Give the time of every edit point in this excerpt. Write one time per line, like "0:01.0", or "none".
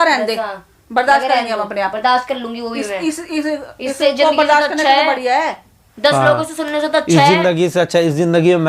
none